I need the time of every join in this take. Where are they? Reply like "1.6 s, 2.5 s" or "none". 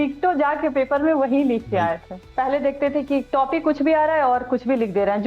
2.2 s, 3.3 s